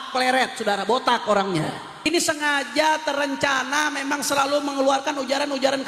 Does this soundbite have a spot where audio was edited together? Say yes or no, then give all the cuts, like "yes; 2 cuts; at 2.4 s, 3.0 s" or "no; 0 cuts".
yes; 1 cut; at 2.1 s